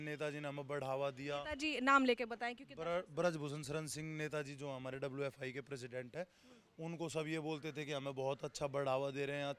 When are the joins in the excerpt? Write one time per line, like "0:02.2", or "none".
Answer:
none